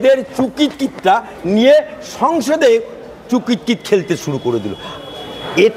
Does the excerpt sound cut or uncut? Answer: uncut